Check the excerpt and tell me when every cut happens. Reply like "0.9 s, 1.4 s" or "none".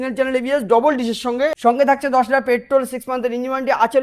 1.6 s